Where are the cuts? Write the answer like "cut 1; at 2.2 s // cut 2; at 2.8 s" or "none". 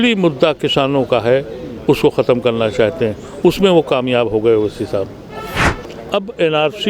cut 1; at 5.7 s